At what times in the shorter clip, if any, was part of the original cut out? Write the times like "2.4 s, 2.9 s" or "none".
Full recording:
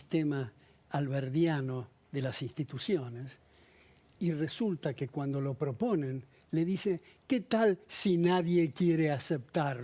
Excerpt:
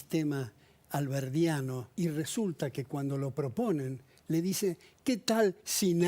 1.8 s